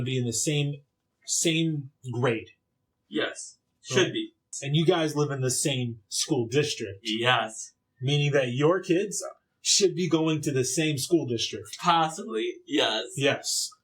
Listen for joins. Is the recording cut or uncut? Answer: cut